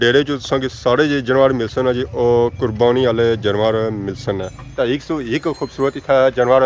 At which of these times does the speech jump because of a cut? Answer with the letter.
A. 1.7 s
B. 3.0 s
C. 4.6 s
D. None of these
C